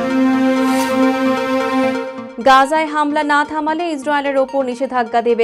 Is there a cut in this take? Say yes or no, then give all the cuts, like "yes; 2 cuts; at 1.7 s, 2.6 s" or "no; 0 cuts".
no; 0 cuts